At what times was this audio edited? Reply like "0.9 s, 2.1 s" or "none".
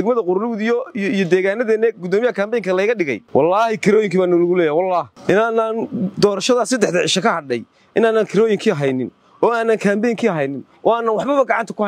3.2 s, 5.1 s